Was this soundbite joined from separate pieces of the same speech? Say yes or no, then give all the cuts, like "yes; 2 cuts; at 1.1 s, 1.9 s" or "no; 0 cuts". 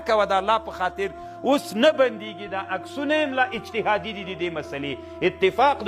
no; 0 cuts